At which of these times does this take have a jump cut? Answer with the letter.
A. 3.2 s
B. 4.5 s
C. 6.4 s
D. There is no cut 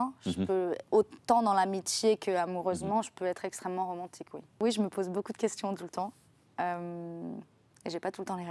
B